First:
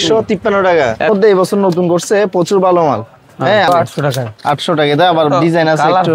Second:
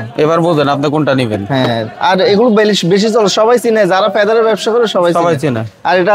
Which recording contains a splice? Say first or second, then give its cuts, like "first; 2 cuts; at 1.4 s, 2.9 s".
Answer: first; 2 cuts; at 1.1 s, 3.7 s